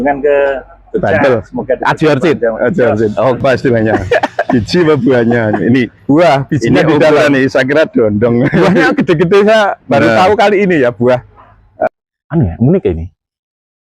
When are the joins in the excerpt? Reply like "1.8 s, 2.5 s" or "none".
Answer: 3.4 s, 11.9 s